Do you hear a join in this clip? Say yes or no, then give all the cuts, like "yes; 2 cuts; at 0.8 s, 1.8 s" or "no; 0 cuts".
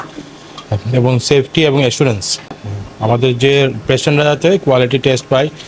no; 0 cuts